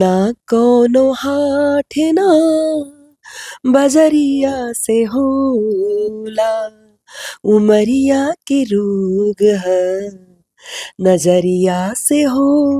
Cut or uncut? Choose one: uncut